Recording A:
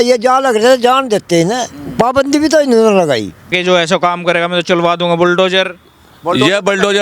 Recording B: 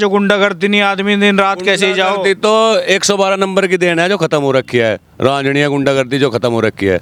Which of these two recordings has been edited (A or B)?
A